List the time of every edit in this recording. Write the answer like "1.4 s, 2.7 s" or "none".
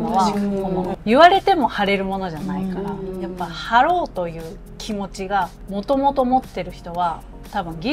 0.9 s, 5.6 s